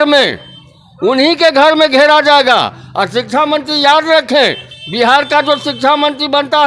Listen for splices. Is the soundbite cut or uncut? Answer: uncut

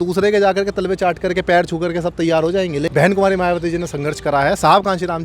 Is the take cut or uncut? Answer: cut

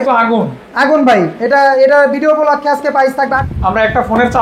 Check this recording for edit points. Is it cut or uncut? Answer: cut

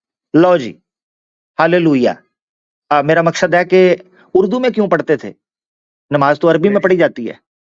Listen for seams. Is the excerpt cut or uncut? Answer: uncut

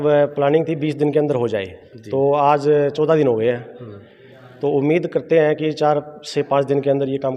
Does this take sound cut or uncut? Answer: uncut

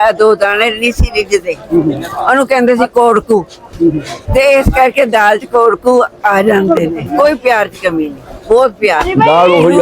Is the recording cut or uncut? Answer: cut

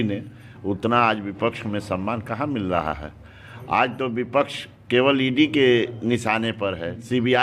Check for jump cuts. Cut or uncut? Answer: uncut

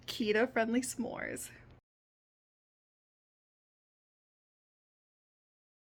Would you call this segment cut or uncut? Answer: uncut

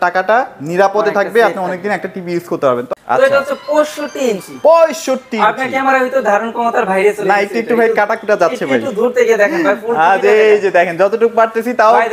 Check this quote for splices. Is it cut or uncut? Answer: cut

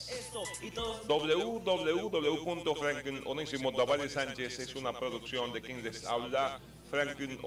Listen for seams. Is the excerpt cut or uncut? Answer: uncut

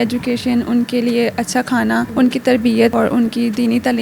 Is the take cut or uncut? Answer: cut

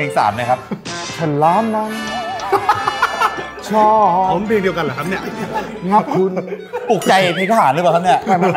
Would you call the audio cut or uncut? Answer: uncut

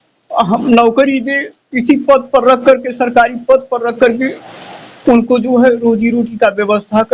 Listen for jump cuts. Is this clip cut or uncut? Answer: uncut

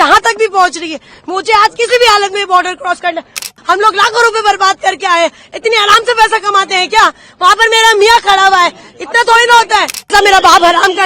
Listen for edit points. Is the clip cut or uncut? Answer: cut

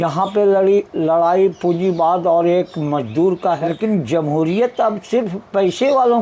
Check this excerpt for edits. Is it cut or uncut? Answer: cut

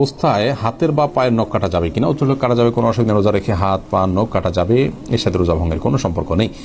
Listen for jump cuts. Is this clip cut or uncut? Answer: uncut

